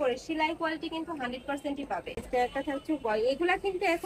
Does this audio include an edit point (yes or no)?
yes